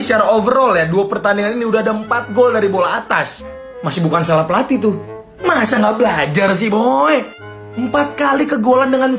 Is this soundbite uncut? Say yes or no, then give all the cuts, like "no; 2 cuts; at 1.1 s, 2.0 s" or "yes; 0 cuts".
yes; 0 cuts